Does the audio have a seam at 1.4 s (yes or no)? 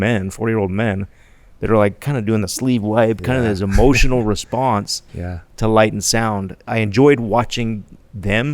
no